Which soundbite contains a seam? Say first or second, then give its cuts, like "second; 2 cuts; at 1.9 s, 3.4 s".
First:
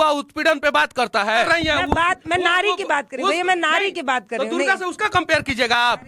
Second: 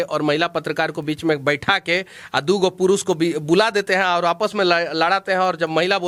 first; 1 cut; at 1.4 s